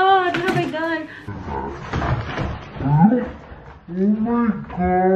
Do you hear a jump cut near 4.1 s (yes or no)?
no